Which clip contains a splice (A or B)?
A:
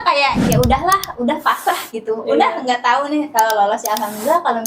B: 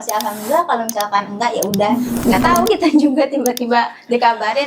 B